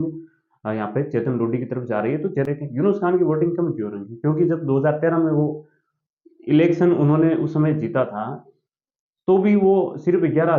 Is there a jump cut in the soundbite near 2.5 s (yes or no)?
yes